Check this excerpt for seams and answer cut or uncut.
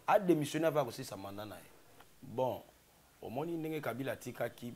cut